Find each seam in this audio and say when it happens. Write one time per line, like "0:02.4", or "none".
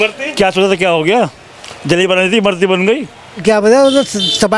0:03.4